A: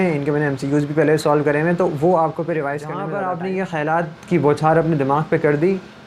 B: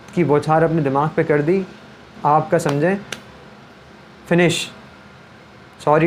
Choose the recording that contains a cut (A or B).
A